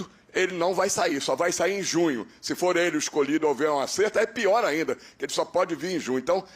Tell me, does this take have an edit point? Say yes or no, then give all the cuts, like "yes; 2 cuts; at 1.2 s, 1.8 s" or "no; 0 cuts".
no; 0 cuts